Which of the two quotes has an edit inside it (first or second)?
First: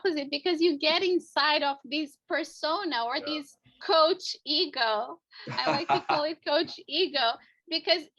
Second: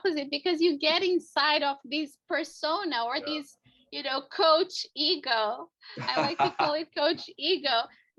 first